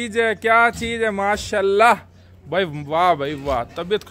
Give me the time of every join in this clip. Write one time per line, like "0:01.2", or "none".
none